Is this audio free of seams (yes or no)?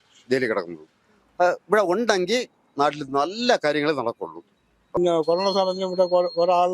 no